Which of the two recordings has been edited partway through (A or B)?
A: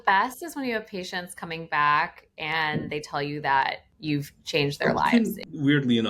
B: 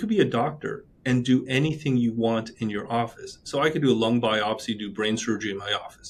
A